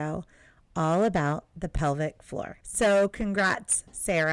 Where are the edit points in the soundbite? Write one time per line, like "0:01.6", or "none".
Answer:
0:02.6